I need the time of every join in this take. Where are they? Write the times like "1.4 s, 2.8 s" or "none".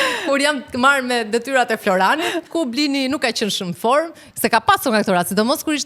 2.5 s, 4.2 s